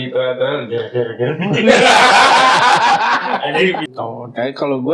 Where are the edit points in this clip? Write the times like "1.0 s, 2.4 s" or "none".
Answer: 3.8 s

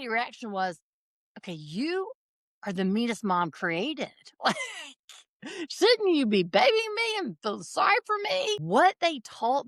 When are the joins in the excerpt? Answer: 8.6 s

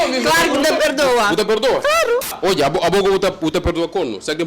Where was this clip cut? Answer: 2.3 s

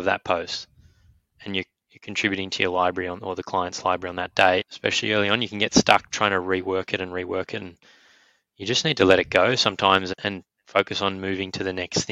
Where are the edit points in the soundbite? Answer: 4.7 s, 10.1 s

